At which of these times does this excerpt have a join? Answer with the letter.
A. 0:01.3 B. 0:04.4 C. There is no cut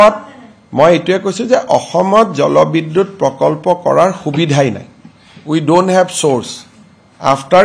C